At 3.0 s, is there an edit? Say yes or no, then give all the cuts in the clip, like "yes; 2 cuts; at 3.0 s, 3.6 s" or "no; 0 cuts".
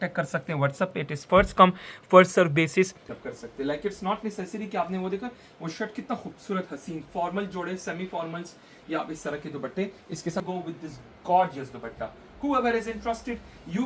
yes; 2 cuts; at 3.0 s, 10.4 s